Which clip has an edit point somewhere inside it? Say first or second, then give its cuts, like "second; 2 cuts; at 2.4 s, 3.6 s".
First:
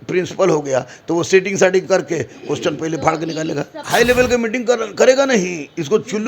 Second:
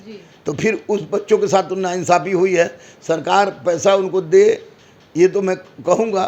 first; 1 cut; at 3.8 s